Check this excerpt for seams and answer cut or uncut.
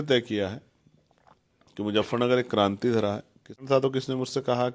cut